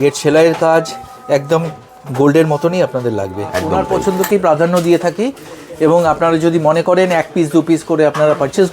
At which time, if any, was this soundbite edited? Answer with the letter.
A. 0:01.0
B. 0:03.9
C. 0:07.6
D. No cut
B